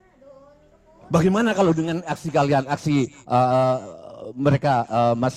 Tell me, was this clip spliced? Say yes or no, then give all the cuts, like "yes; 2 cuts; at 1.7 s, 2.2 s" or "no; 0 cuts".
no; 0 cuts